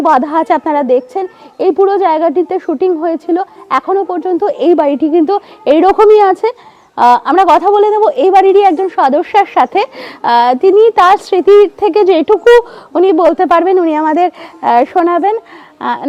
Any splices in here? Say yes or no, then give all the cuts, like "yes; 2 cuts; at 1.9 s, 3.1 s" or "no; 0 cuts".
no; 0 cuts